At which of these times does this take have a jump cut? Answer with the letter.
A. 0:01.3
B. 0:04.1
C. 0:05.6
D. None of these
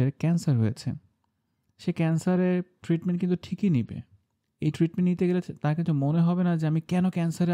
D